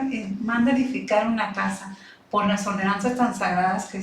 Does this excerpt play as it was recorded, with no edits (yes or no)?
yes